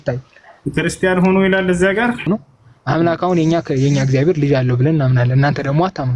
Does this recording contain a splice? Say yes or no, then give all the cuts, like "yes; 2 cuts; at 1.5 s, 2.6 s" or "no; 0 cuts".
yes; 1 cut; at 2.2 s